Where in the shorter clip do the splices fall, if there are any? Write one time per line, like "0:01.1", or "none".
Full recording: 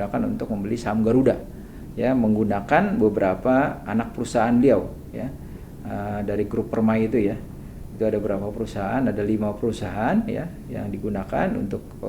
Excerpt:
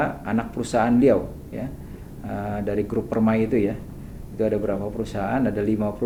none